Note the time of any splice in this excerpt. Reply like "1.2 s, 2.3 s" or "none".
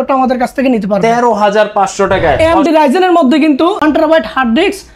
2.4 s, 3.8 s